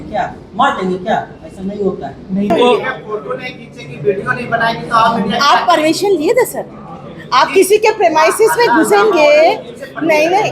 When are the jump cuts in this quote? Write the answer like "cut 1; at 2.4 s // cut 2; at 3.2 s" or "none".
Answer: cut 1; at 2.5 s